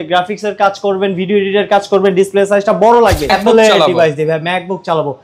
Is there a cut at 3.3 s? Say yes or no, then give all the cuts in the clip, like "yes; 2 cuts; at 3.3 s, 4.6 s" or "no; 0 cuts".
yes; 1 cut; at 3.3 s